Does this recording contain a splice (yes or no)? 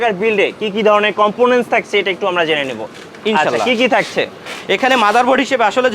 no